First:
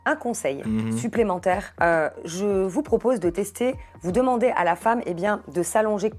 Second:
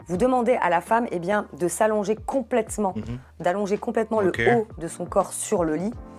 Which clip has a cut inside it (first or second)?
first